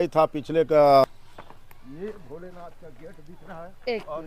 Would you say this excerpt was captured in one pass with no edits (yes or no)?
no